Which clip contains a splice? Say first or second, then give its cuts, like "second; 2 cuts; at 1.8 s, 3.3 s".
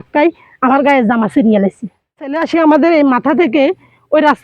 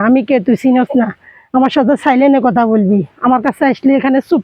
first; 1 cut; at 2.4 s